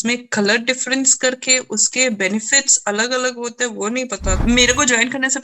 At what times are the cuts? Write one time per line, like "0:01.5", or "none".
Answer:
0:04.4